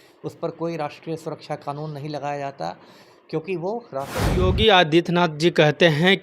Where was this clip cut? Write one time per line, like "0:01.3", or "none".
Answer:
0:04.2